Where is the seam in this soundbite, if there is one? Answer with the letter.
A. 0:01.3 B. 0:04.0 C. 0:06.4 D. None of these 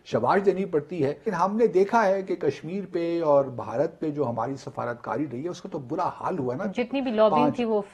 A